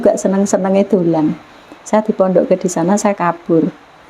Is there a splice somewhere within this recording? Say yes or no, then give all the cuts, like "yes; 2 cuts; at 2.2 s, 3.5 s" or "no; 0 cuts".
no; 0 cuts